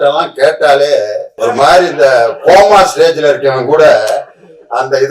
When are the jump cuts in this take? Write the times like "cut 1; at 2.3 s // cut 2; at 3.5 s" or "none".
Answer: cut 1; at 1.2 s